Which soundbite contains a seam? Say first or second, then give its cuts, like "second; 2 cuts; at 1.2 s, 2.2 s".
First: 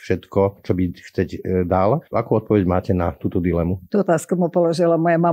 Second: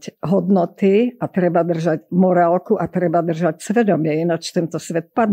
first; 2 cuts; at 2.0 s, 3.8 s